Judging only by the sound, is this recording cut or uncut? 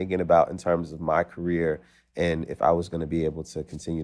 uncut